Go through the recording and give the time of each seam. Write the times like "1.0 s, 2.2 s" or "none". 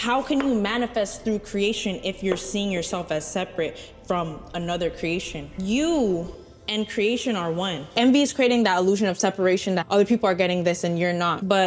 8.0 s